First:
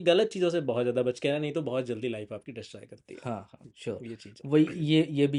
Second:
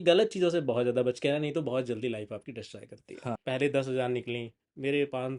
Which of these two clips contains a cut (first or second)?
second